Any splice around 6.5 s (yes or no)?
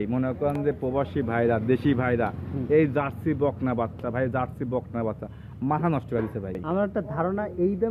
yes